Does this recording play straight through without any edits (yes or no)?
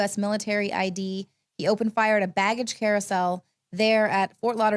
no